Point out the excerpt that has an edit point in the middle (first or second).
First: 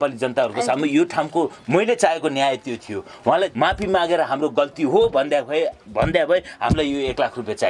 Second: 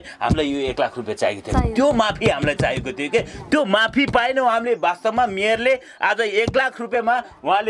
first